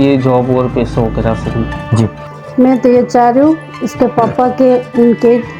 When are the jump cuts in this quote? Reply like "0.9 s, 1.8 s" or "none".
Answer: 1.9 s